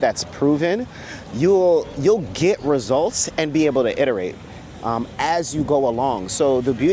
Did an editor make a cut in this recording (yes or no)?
no